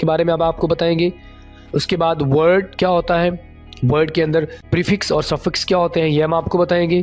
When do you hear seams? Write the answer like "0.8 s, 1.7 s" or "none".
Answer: 4.6 s